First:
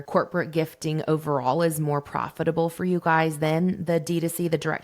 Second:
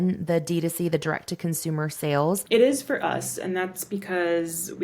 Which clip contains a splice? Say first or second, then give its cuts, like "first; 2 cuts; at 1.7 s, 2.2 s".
second; 1 cut; at 2.4 s